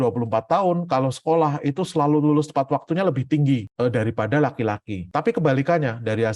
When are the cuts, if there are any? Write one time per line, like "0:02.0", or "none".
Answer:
none